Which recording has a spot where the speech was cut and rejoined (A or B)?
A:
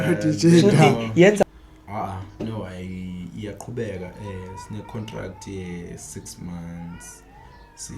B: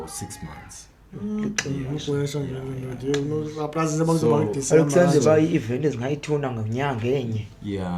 A